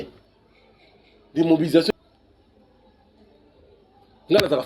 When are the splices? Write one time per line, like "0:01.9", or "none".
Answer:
0:01.9